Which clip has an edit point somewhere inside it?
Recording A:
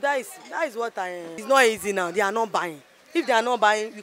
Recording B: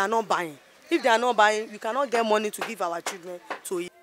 A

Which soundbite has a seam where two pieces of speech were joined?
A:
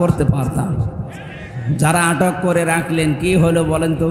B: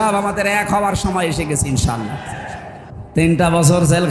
B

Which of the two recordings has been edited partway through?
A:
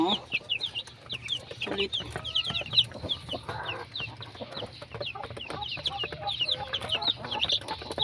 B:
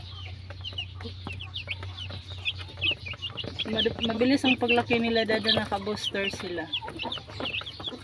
A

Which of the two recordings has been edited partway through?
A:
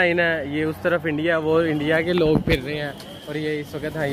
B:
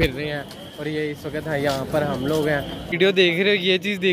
B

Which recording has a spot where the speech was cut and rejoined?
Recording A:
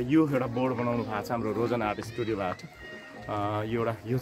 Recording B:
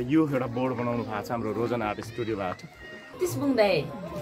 B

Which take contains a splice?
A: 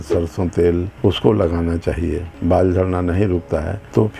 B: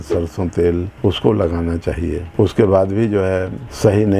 A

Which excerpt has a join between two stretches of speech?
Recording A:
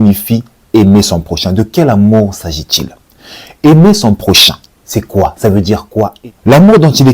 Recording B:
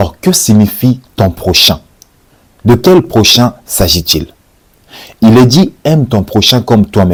A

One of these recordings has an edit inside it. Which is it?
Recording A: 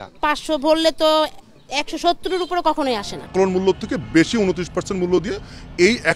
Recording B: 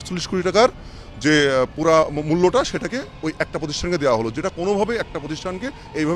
A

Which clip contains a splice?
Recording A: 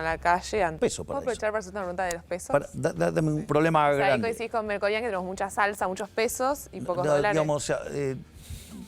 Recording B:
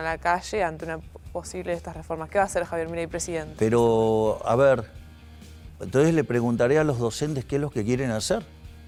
A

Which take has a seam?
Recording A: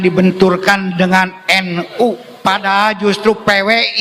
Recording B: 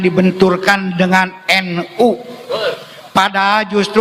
A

